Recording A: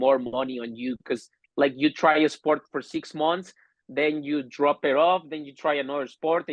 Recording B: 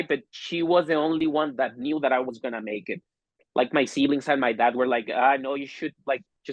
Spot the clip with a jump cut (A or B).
B